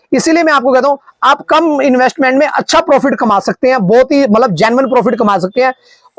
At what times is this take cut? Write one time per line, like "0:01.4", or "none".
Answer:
none